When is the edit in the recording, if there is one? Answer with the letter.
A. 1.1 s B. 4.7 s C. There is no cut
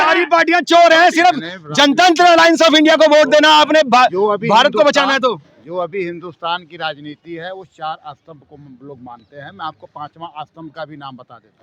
C